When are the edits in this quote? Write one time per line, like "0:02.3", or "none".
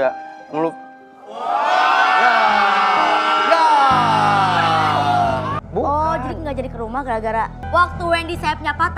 0:05.6
0:07.6